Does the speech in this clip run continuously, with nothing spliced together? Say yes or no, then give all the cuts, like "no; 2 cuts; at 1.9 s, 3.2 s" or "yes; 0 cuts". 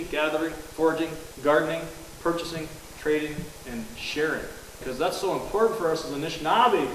no; 2 cuts; at 0.9 s, 4.8 s